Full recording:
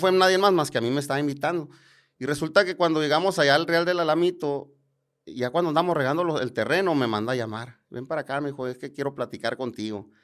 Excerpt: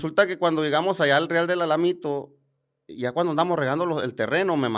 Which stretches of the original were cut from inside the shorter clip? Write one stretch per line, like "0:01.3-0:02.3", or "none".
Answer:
none